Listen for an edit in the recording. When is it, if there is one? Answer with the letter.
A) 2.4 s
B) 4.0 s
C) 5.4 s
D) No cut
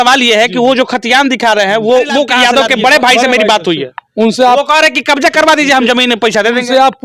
A